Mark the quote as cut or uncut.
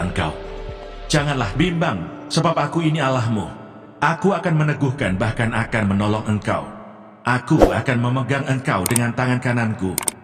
uncut